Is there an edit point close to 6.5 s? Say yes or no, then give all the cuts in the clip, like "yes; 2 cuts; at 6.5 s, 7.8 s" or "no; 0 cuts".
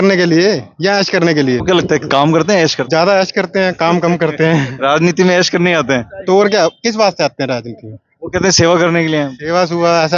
no; 2 cuts; at 1.6 s, 2.8 s